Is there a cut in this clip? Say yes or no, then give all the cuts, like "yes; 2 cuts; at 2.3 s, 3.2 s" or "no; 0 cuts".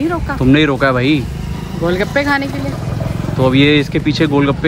no; 0 cuts